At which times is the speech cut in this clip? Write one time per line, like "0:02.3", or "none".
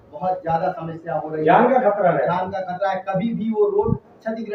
none